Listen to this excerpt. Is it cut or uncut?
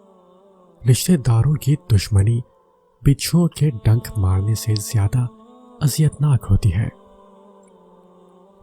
cut